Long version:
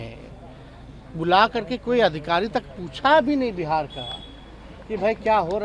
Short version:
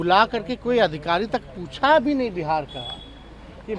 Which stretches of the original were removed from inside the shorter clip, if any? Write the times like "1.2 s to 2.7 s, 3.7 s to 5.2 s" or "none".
none